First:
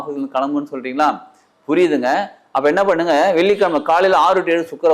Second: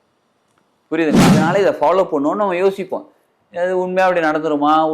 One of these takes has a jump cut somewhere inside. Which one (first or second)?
second